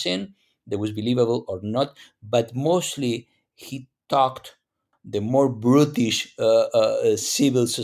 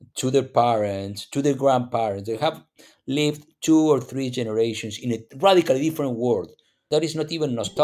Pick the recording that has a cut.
second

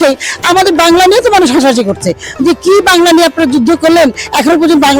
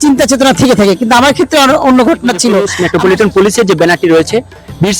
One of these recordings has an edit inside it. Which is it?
second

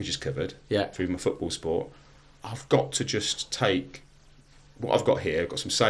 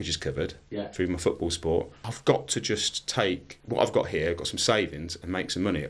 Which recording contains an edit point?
second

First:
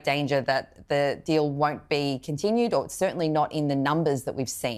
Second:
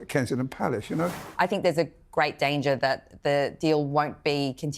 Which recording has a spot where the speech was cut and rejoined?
second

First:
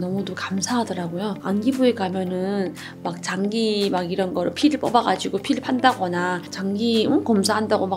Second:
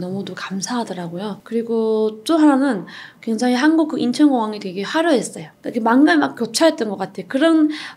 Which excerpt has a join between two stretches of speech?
first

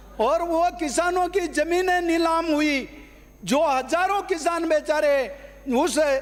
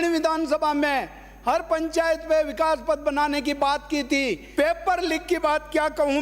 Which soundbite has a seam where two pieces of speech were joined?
second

